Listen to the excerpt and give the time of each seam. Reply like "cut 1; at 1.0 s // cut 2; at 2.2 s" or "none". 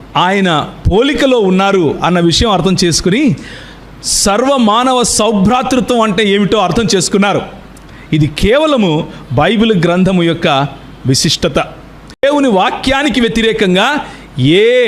cut 1; at 12.2 s